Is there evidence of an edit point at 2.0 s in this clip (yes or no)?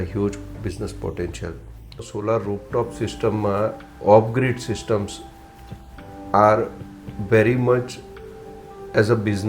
yes